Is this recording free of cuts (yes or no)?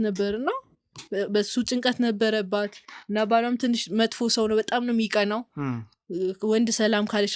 yes